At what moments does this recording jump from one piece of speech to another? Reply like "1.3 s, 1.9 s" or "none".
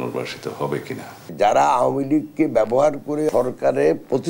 1.2 s, 3.3 s

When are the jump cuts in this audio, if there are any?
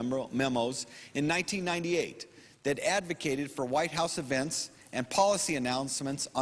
5.3 s

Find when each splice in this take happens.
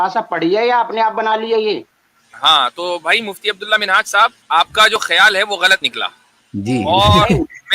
4.4 s

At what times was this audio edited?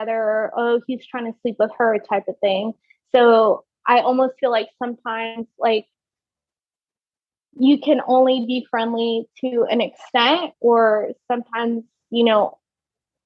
none

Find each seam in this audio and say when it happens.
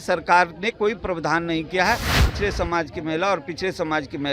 2.2 s

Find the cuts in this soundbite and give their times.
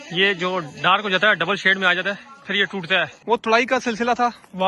3.2 s

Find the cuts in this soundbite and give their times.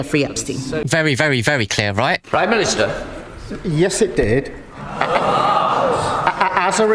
none

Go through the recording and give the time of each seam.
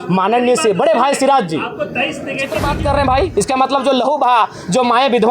2.6 s

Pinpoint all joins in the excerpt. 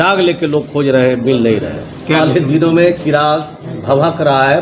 2.2 s

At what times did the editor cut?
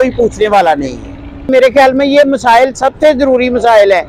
1.5 s

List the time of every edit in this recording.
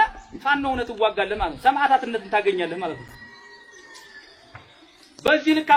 none

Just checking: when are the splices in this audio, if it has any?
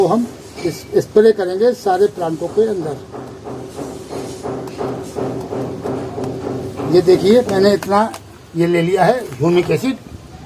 none

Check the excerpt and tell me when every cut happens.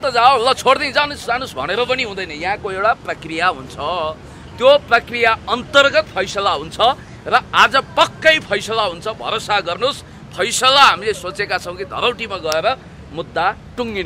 none

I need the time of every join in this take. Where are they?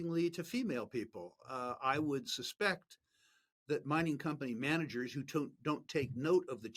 none

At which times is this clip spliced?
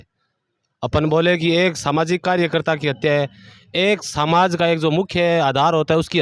none

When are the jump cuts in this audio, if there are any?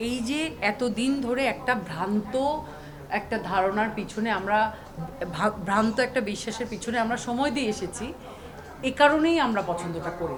none

